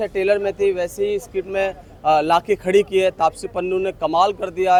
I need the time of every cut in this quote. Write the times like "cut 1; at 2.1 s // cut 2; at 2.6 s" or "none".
none